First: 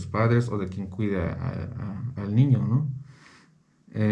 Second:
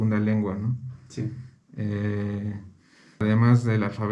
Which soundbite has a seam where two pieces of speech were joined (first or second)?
second